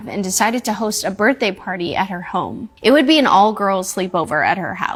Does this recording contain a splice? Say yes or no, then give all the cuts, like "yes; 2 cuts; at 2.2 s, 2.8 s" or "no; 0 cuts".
no; 0 cuts